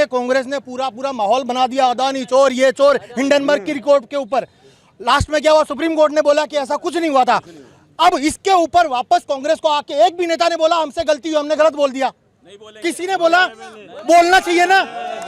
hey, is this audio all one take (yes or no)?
yes